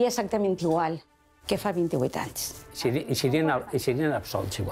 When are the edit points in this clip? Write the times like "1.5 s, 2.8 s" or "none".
none